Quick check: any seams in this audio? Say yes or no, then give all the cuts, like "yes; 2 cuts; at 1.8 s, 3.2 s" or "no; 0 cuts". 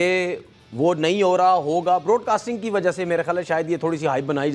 no; 0 cuts